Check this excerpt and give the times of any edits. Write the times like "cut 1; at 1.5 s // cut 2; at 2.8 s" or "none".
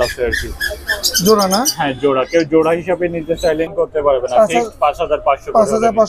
cut 1; at 3.7 s